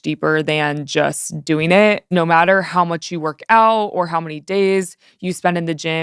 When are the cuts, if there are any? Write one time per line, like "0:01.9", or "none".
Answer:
0:02.0